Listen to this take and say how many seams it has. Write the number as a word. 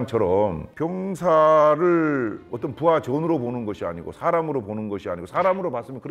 zero